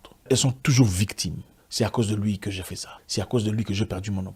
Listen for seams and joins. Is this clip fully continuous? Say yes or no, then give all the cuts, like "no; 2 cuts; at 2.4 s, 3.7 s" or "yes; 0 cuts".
yes; 0 cuts